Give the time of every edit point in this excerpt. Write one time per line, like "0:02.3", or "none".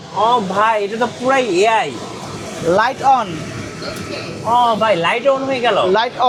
none